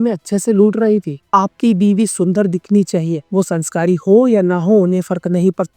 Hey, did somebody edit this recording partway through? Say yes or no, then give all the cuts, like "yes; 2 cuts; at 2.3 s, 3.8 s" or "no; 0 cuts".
yes; 1 cut; at 1.2 s